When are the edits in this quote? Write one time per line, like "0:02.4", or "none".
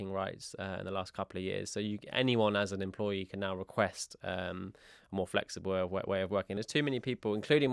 0:06.5